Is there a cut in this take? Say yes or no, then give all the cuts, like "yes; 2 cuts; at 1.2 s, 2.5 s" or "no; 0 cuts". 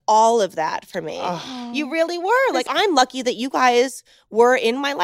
yes; 1 cut; at 2.6 s